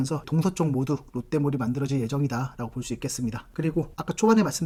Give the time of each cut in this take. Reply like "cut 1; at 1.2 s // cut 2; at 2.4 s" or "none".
none